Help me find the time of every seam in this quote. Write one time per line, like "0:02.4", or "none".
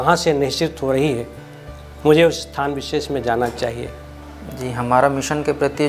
none